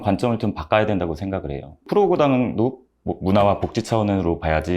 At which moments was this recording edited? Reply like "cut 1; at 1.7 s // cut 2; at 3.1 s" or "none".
cut 1; at 1.8 s